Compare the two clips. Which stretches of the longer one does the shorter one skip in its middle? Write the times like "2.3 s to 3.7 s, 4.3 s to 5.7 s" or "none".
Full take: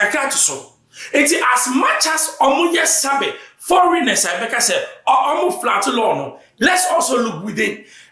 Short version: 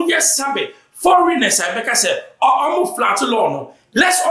none